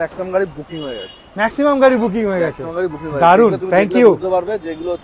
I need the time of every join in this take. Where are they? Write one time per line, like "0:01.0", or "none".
none